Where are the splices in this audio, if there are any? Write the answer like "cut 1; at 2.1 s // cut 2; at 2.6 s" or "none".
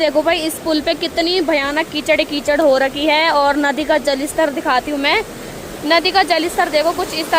none